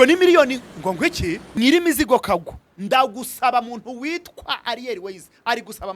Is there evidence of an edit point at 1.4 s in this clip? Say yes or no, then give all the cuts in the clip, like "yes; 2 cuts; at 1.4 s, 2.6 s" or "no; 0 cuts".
yes; 1 cut; at 1.4 s